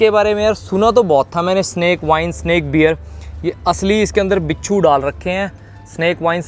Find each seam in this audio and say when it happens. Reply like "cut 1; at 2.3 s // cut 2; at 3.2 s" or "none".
none